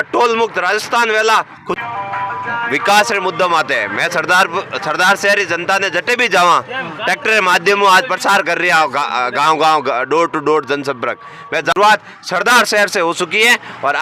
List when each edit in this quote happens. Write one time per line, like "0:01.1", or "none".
0:01.7
0:11.7

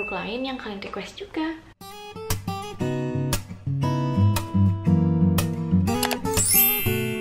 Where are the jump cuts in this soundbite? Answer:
0:01.7

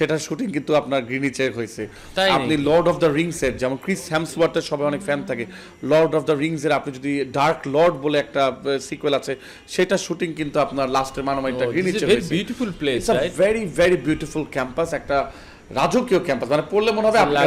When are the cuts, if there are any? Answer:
none

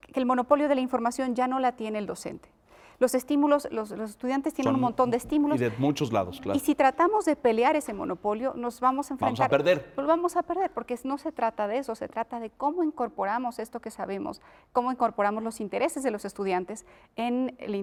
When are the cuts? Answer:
none

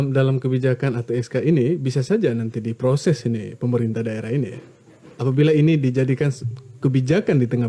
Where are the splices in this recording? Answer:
none

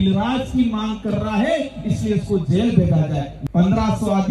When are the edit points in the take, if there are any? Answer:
0:03.3

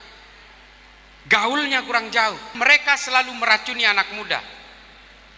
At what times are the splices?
0:02.5

